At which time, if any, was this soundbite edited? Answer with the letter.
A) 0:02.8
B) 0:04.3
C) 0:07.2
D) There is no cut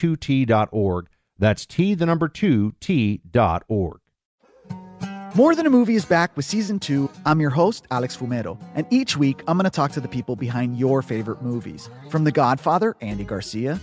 B